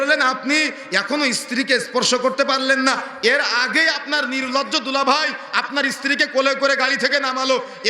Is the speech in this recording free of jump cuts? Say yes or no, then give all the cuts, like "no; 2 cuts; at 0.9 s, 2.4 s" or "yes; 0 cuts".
yes; 0 cuts